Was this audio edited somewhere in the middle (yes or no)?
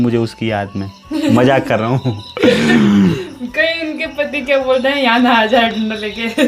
no